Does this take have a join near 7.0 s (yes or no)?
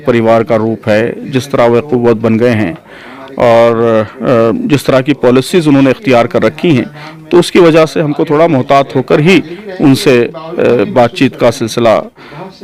no